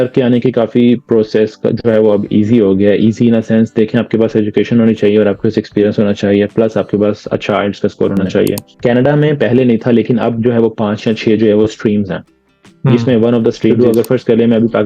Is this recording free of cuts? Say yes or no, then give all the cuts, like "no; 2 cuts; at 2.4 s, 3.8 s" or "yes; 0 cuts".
no; 2 cuts; at 8.7 s, 13.7 s